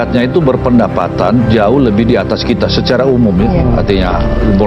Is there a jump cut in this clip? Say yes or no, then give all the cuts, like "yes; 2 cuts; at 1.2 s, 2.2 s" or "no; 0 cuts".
no; 0 cuts